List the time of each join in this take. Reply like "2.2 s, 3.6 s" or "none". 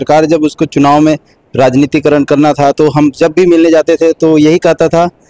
none